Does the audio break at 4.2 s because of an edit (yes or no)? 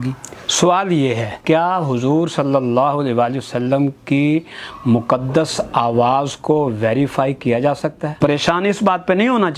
no